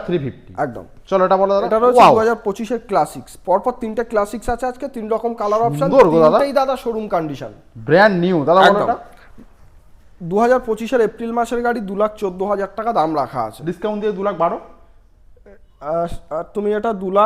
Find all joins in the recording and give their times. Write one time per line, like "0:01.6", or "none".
none